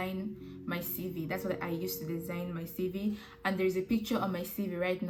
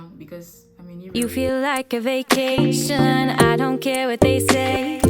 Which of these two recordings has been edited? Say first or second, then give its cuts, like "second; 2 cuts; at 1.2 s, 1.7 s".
second; 1 cut; at 1.1 s